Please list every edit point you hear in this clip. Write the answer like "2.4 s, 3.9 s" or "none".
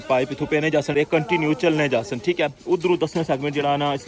0.9 s